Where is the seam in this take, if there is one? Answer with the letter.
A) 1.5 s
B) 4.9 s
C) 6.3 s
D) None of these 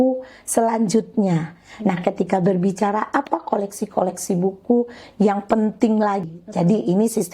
C